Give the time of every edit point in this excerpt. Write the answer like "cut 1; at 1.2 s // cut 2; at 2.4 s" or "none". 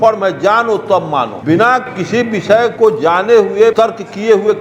cut 1; at 1.4 s // cut 2; at 2.7 s // cut 3; at 3.7 s